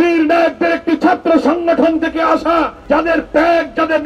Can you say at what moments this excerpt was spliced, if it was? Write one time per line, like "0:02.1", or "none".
0:02.8